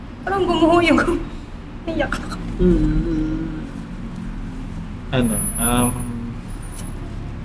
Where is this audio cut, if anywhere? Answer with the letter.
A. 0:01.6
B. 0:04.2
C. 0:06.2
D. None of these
D